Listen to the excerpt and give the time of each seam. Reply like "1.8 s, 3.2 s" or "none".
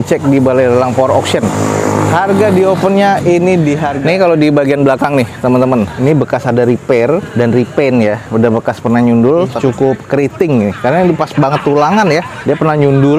3.9 s, 5.9 s, 9.5 s